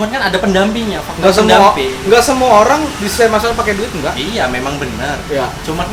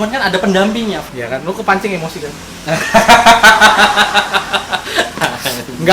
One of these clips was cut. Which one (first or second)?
second